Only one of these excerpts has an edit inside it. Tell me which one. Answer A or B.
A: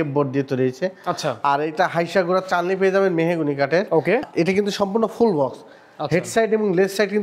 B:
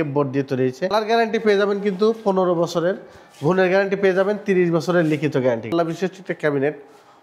B